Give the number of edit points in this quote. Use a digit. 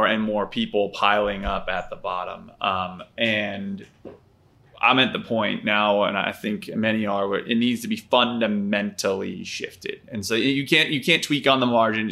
0